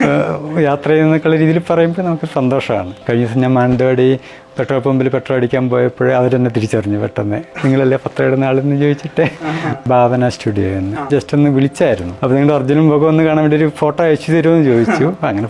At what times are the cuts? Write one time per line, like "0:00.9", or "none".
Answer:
0:02.9
0:09.8
0:11.1
0:12.1